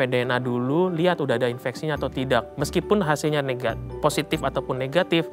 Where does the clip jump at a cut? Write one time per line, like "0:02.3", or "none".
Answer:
none